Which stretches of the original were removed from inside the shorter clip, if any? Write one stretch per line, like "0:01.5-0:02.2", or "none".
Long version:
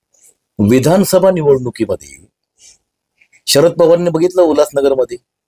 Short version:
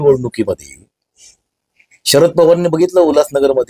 none